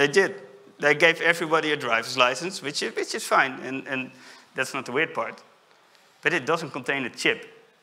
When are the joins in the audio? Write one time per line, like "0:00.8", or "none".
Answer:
none